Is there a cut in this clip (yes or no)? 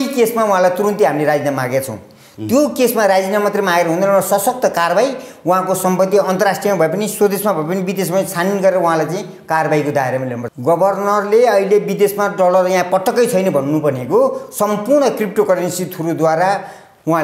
yes